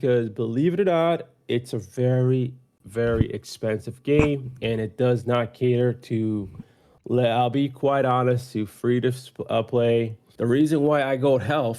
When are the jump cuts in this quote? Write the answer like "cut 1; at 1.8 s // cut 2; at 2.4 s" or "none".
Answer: cut 1; at 10.2 s